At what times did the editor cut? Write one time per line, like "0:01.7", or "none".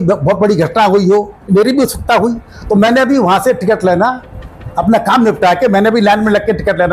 0:01.5